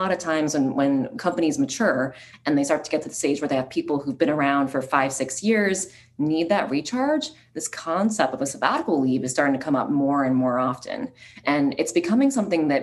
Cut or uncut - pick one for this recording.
cut